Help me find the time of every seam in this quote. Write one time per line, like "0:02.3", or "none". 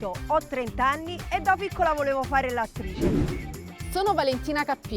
0:02.8
0:03.7